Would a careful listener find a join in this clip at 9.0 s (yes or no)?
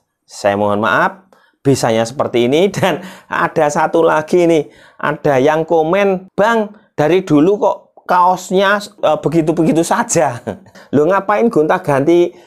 yes